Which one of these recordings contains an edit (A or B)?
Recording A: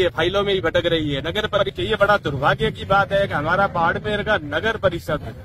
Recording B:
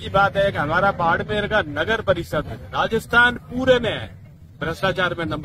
A